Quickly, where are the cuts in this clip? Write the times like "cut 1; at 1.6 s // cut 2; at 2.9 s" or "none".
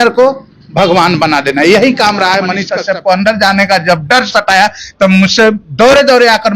cut 1; at 2.7 s